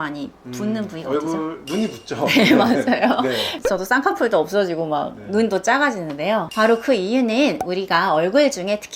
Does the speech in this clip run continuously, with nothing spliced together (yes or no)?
no